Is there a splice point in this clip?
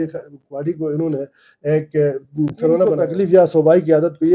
yes; 1 cut; at 3.0 s

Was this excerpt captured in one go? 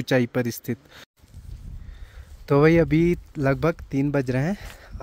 no; 1 cut; at 1.2 s

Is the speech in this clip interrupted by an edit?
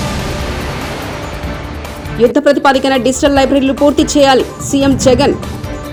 no; 0 cuts

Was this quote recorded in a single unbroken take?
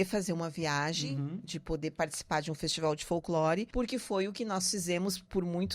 no; 1 cut; at 3.7 s

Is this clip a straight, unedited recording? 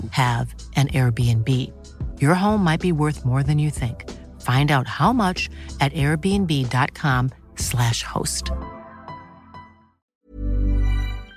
no; 1 cut; at 10.1 s

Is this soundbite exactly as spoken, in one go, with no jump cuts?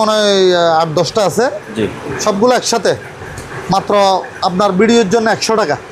yes; 0 cuts

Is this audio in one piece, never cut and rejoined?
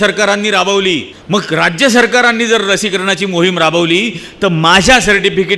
no; 1 cut; at 1.1 s

